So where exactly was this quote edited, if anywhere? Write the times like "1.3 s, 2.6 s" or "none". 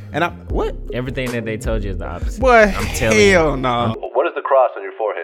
3.9 s